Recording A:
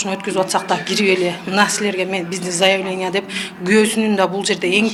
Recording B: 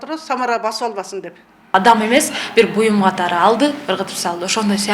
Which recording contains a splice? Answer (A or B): B